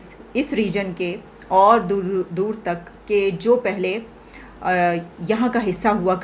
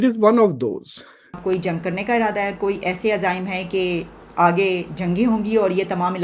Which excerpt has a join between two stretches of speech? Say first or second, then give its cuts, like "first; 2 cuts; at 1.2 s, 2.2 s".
second; 1 cut; at 1.4 s